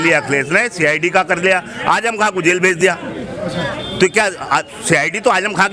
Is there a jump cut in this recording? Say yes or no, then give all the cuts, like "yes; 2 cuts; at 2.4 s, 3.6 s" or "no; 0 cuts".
no; 0 cuts